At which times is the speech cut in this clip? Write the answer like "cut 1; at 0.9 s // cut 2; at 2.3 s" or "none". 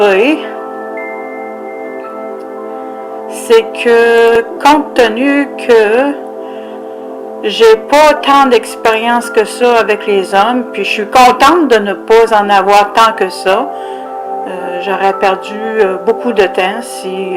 cut 1; at 10.0 s